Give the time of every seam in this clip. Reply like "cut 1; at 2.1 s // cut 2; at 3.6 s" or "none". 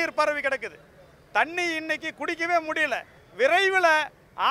cut 1; at 3.2 s